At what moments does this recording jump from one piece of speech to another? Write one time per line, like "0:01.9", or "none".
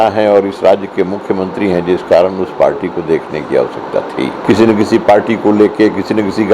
0:04.4